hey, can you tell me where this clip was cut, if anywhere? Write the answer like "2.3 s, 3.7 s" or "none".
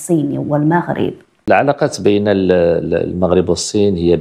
1.3 s